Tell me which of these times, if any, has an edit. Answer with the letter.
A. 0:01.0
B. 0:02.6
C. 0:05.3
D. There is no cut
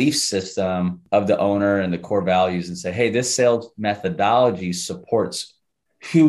A